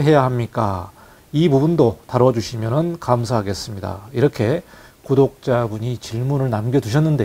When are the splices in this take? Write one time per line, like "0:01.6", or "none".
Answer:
none

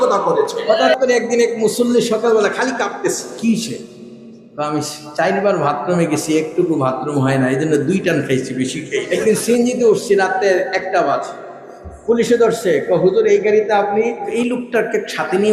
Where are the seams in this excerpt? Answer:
0:00.9
0:03.3
0:09.1
0:14.2

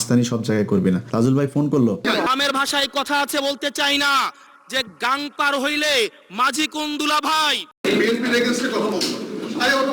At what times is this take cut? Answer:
0:02.0
0:07.8

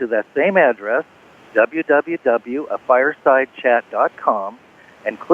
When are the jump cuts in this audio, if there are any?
0:04.4

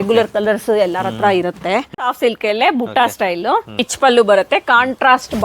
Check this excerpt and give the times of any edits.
0:01.9
0:03.9

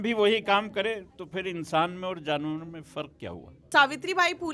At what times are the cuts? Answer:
0:03.6

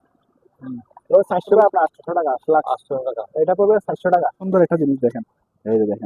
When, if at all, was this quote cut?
0:01.6
0:04.4

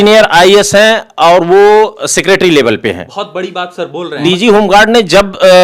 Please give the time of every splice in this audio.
0:04.2

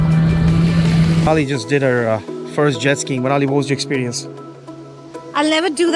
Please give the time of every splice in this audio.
0:01.3

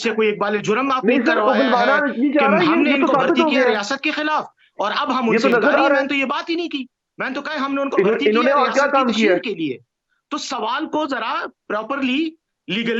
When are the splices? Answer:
none

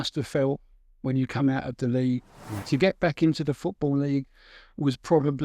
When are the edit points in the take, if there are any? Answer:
0:02.5

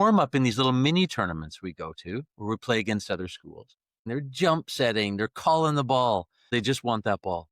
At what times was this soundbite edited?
0:04.1
0:06.5

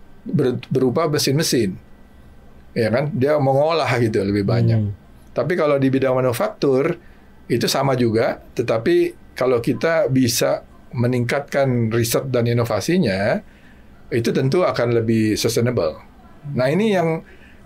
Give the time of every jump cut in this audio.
none

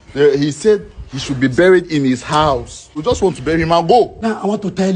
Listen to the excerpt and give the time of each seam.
0:02.9
0:04.1

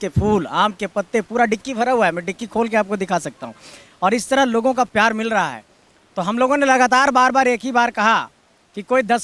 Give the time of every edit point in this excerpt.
none

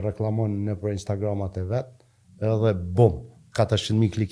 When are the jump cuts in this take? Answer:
none

